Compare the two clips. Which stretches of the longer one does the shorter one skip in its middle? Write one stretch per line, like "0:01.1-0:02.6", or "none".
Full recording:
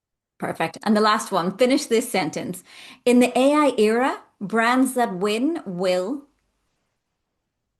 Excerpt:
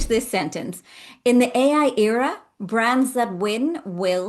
none